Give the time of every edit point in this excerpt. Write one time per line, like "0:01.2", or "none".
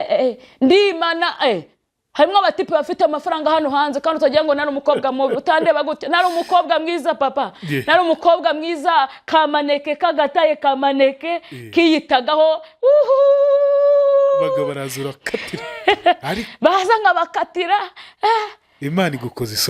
none